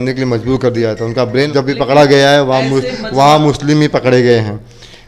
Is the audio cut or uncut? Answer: cut